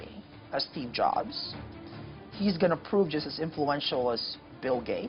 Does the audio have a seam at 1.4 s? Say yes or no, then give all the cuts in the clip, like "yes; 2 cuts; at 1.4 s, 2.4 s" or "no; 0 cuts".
no; 0 cuts